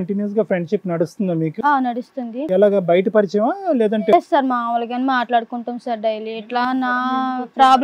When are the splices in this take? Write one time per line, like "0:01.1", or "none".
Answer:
none